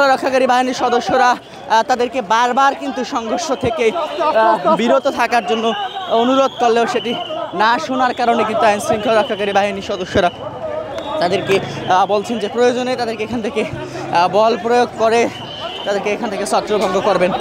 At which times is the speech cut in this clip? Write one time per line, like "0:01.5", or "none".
none